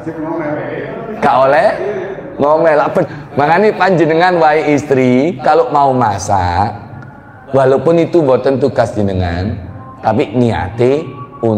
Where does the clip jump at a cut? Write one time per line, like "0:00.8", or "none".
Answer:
0:03.1